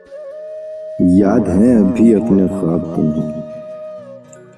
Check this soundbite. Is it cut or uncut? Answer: cut